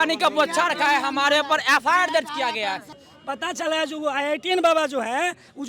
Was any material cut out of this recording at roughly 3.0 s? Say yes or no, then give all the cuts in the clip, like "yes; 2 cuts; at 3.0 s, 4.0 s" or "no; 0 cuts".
yes; 1 cut; at 3.0 s